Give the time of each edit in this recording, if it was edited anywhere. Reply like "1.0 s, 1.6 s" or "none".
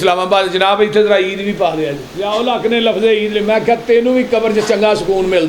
2.1 s